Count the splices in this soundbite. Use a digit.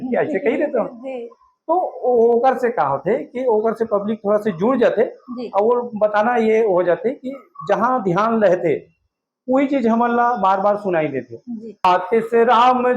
1